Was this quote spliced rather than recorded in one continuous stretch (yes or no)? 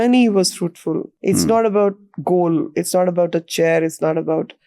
yes